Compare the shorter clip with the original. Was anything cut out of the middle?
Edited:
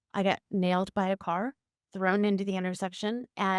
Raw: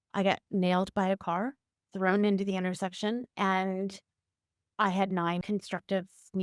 no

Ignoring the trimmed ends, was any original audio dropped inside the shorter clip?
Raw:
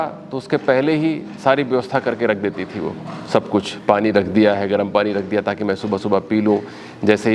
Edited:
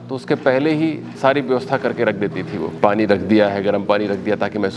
yes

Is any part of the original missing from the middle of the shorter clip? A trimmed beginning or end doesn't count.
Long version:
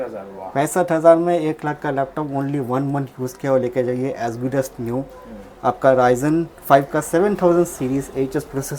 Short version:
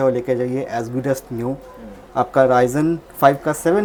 no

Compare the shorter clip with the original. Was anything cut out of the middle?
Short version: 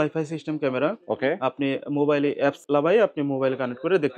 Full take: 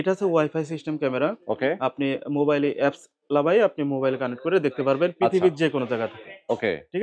yes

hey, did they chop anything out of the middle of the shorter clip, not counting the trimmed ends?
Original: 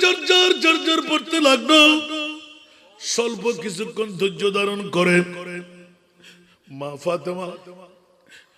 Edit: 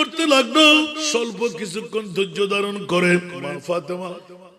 yes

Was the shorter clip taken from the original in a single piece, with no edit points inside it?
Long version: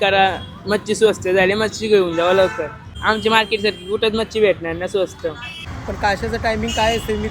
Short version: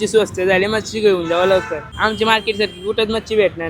no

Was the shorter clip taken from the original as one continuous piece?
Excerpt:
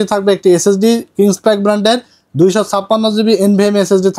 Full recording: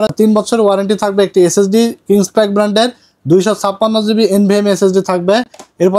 yes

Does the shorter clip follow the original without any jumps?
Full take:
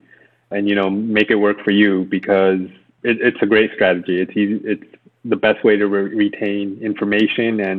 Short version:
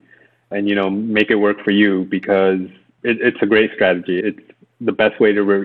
no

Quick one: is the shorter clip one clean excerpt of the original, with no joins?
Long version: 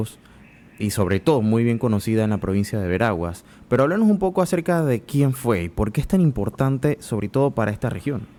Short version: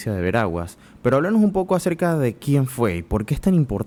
yes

